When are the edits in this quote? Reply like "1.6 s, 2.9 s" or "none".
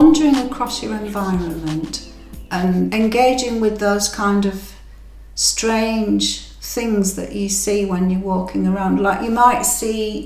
2.9 s